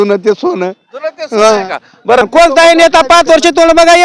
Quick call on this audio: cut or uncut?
cut